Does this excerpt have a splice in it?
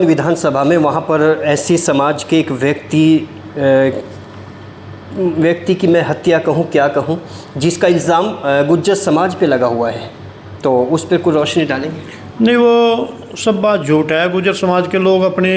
no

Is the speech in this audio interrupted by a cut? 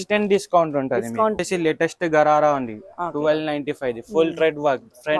yes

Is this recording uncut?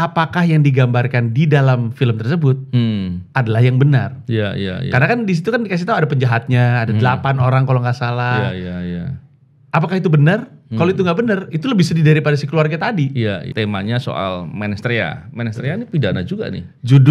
no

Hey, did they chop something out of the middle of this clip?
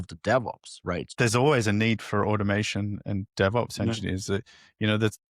yes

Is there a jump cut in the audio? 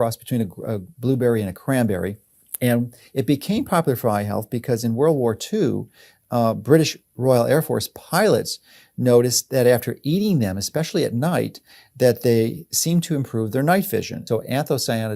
yes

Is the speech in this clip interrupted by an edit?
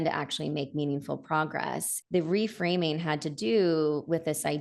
yes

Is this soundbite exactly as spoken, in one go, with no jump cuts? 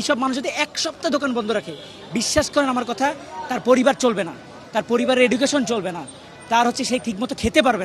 yes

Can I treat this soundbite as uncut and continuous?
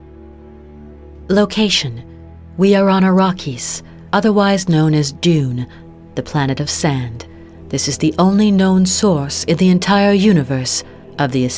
no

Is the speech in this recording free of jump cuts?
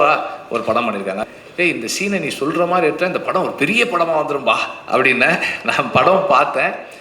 no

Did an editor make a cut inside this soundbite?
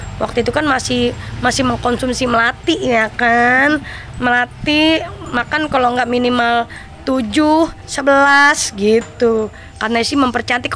no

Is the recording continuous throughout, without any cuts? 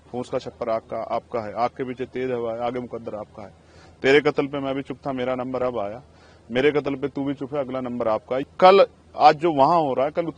no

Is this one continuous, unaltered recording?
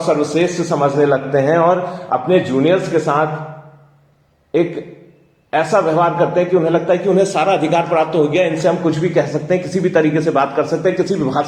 yes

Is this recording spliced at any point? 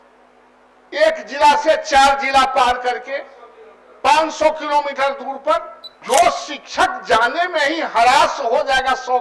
yes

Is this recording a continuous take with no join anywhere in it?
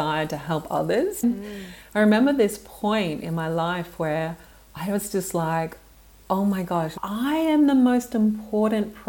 no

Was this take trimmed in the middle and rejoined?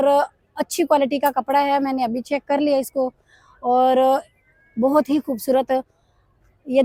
no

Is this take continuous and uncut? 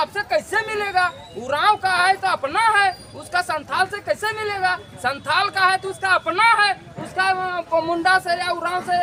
yes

